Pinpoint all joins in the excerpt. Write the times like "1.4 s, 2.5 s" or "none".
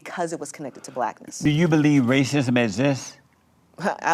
1.3 s